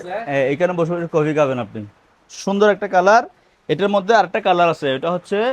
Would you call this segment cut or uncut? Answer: uncut